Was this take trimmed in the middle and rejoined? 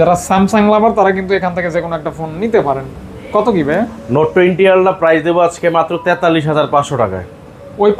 no; 0 cuts

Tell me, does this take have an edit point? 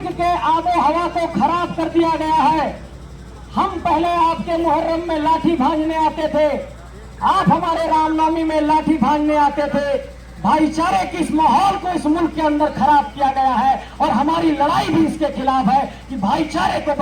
no; 0 cuts

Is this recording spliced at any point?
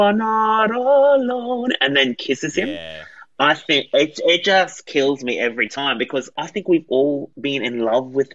yes; 1 cut; at 6.3 s

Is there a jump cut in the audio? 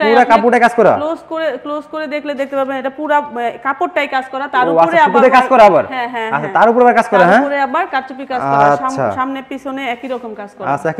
no; 0 cuts

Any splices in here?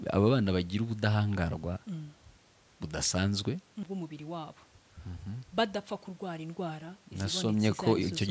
yes; 1 cut; at 3.8 s

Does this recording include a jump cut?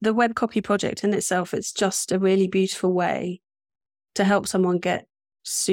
no; 0 cuts

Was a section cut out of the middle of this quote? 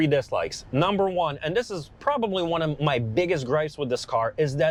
no; 0 cuts

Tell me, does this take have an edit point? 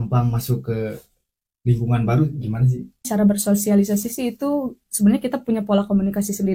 yes; 1 cut; at 3.1 s

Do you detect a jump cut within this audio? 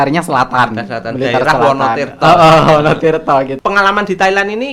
yes; 1 cut; at 3.5 s

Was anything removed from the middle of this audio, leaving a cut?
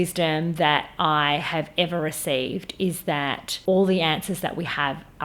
yes; 1 cut; at 3.5 s

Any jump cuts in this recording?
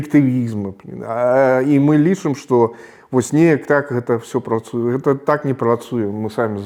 no; 0 cuts

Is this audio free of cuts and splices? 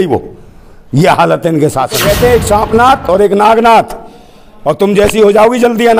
no; 1 cut; at 2.0 s

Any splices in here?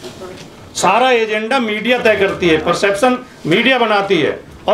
no; 0 cuts

